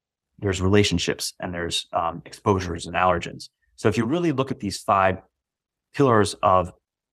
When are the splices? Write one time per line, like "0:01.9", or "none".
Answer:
none

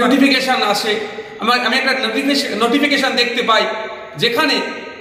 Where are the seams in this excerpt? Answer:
none

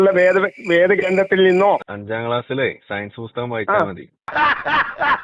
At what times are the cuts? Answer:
0:01.9

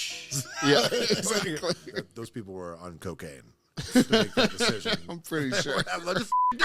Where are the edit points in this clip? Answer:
0:02.0

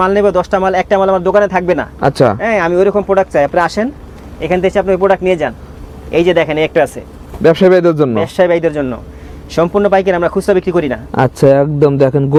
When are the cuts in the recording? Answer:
none

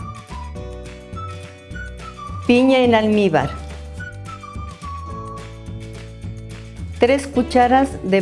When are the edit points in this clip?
0:01.9
0:03.6
0:06.8

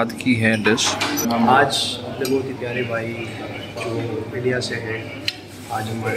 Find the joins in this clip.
0:01.2

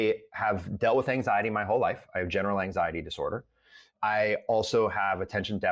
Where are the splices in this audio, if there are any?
0:03.9

